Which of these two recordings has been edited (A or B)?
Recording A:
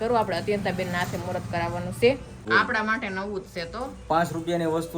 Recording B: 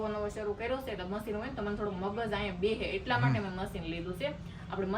A